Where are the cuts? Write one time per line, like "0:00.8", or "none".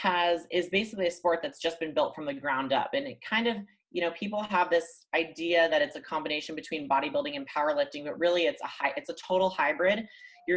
none